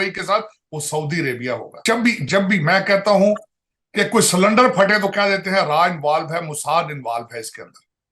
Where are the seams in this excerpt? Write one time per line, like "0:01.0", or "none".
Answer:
0:01.7